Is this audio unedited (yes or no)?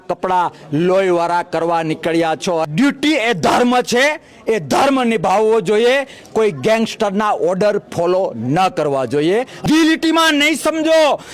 no